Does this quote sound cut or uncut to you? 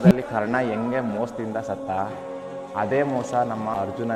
uncut